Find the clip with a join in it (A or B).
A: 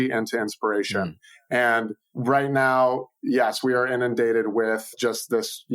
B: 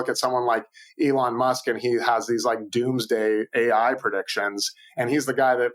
A